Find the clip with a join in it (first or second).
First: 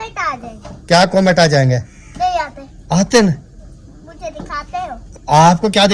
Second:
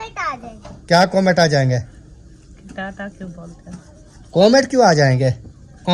first